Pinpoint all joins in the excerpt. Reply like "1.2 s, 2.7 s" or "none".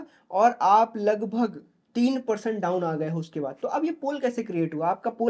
none